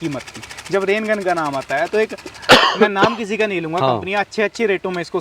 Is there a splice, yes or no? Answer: no